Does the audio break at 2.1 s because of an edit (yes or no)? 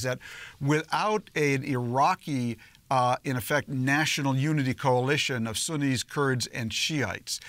no